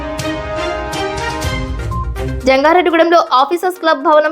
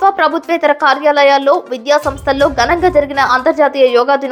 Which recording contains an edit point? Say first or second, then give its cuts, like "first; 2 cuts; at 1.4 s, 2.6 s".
first; 1 cut; at 1.9 s